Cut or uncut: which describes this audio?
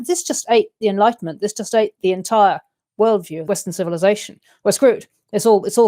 cut